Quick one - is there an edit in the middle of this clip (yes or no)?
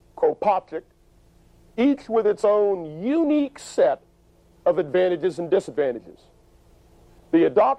yes